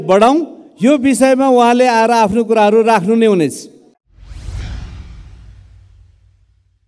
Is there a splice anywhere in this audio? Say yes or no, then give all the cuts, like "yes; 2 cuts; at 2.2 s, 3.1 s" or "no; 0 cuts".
no; 0 cuts